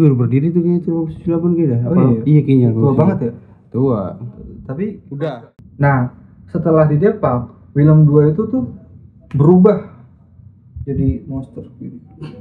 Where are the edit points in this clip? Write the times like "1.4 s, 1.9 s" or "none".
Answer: 5.5 s